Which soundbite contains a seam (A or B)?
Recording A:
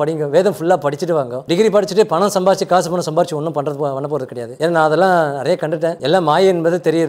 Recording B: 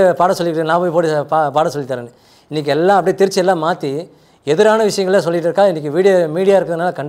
A